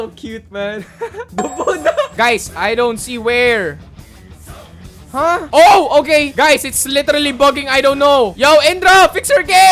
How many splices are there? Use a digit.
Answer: 1